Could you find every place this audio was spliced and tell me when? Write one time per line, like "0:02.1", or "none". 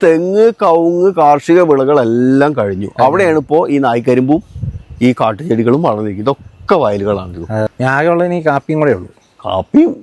0:07.7